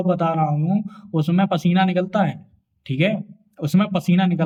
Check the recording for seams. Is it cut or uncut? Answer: uncut